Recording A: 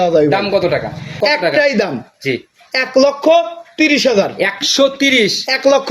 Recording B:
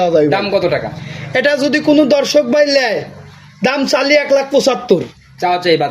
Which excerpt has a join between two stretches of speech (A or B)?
A